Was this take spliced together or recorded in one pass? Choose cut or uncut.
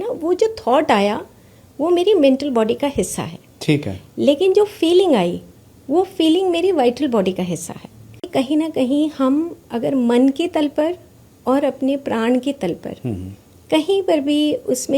cut